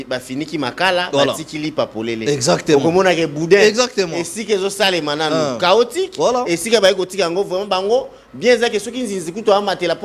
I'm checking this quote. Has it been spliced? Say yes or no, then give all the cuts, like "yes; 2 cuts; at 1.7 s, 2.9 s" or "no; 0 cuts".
no; 0 cuts